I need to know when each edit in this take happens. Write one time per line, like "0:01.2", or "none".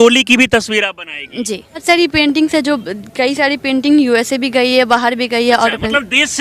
0:01.8